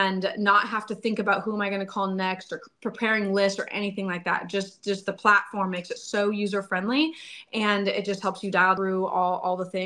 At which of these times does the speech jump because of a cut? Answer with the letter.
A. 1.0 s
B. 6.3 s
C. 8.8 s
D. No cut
C